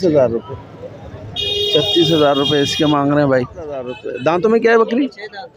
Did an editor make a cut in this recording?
yes; 1 cut; at 4.0 s

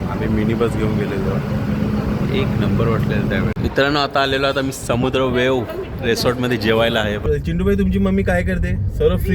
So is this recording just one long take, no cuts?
no; 2 cuts; at 3.5 s, 7.2 s

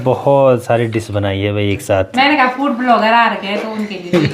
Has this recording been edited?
yes; 1 cut; at 2.2 s

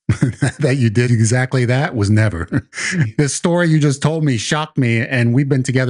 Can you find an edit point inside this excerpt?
yes; 2 cuts; at 1.1 s, 3.1 s

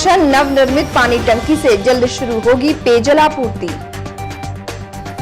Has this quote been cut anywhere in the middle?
no; 0 cuts

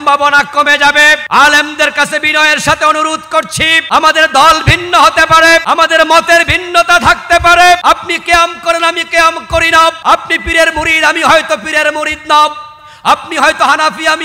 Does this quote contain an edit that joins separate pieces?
yes; 5 cuts; at 1.2 s, 3.8 s, 5.6 s, 7.8 s, 10.0 s

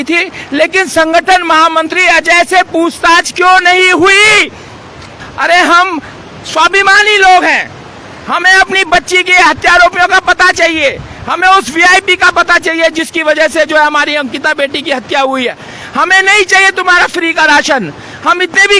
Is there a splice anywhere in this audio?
yes; 1 cut; at 5.1 s

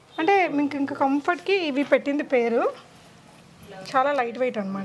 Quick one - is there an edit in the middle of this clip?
no; 0 cuts

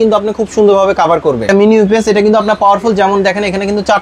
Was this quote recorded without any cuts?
no; 1 cut; at 1.5 s

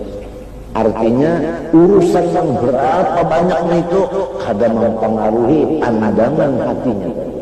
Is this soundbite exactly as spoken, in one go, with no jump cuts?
yes; 0 cuts

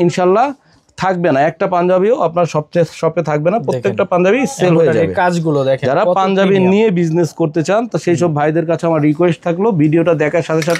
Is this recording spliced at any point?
no; 0 cuts

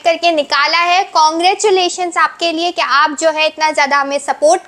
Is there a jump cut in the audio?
no; 0 cuts

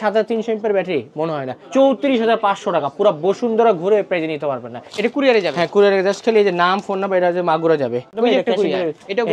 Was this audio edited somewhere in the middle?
yes; 3 cuts; at 1.5 s, 4.8 s, 8.1 s

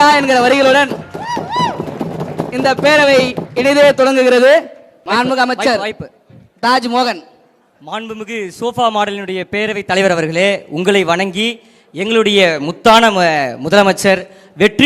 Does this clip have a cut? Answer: yes; 1 cut; at 4.9 s

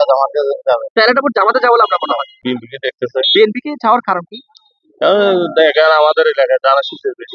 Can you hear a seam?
yes; 1 cut; at 2.3 s

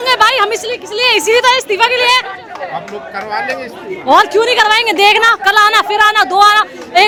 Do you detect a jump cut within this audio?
no; 0 cuts

